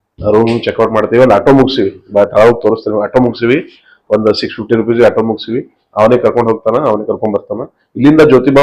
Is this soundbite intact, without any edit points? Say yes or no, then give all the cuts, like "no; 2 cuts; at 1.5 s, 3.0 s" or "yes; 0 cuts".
yes; 0 cuts